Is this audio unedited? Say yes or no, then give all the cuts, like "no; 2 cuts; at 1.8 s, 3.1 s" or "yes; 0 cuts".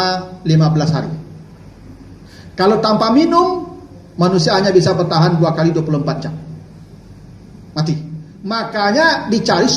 no; 1 cut; at 8.3 s